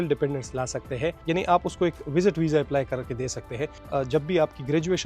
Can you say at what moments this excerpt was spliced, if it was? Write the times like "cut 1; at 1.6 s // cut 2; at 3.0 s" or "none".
cut 1; at 1.2 s // cut 2; at 3.8 s

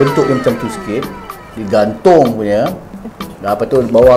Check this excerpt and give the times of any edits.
none

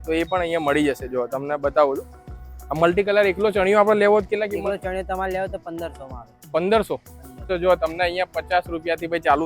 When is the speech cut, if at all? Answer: cut 1; at 7.5 s

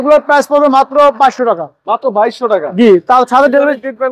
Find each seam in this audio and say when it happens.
none

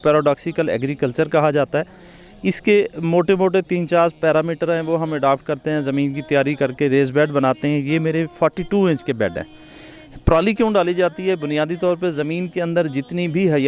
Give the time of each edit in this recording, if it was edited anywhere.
none

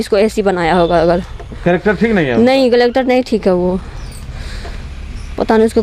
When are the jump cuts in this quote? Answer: none

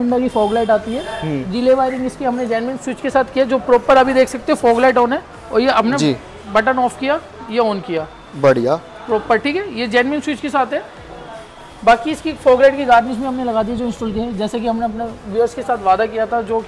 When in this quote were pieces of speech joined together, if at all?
none

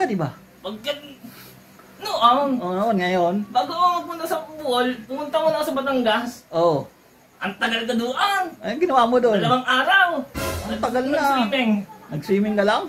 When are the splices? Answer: none

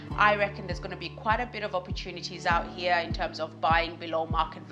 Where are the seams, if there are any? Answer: none

